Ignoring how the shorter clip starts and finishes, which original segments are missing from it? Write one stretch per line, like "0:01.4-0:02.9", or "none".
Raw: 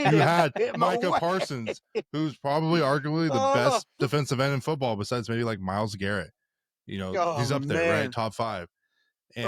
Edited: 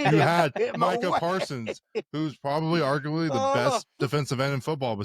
none